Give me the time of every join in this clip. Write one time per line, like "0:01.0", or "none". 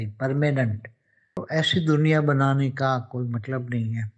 0:01.4